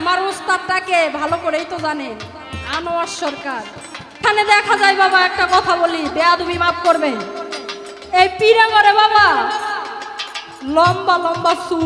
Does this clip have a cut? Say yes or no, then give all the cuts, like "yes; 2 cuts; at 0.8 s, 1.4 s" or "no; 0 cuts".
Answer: yes; 1 cut; at 4.2 s